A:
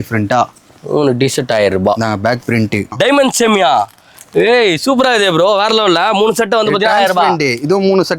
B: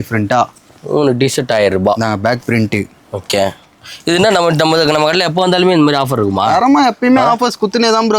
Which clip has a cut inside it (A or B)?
A